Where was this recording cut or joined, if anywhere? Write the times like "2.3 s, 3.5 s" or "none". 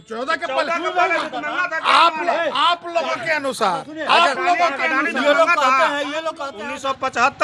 6.5 s